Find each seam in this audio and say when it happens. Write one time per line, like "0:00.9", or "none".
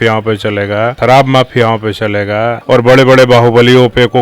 0:01.0
0:02.6